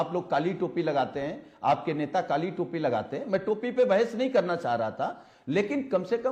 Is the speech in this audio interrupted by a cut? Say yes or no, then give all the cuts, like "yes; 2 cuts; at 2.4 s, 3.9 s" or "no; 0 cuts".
no; 0 cuts